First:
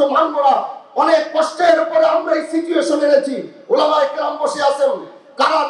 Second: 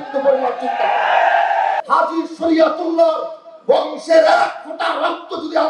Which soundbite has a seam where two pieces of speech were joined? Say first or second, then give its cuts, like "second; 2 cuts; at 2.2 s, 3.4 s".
second; 1 cut; at 1.8 s